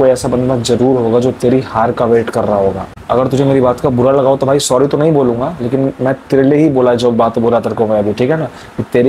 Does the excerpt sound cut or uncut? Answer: cut